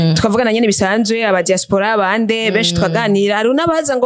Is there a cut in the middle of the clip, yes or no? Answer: no